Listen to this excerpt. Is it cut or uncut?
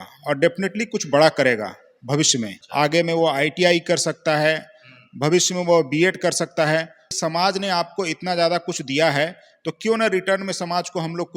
cut